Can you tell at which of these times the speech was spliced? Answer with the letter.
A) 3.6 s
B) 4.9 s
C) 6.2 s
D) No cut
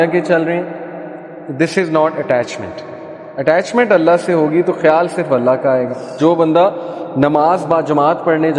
C